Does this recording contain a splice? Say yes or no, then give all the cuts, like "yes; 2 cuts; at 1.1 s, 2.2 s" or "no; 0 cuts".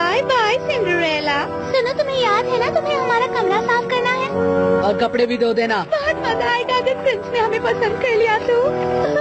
no; 0 cuts